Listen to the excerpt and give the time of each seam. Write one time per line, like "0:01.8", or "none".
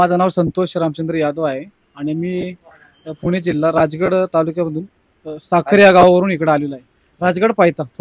none